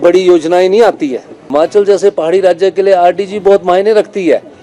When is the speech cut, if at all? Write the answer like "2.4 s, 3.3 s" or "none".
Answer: 1.3 s